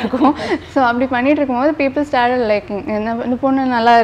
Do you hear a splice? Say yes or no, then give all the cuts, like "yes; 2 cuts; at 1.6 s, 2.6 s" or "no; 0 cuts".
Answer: no; 0 cuts